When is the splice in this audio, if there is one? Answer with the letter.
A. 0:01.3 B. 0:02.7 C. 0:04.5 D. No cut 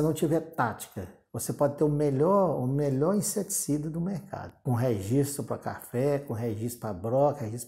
C